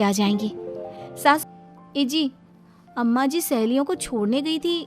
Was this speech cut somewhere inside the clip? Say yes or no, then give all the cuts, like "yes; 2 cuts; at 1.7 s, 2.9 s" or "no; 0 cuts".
yes; 1 cut; at 1.4 s